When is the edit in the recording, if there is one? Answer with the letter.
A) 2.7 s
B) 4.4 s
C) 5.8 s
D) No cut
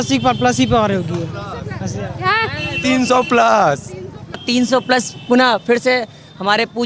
B